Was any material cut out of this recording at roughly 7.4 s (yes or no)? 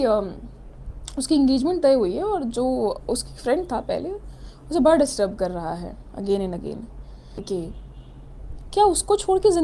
yes